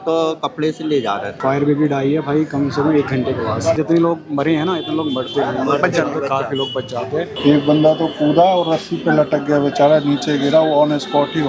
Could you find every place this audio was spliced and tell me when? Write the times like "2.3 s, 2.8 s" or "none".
1.3 s, 3.8 s, 7.3 s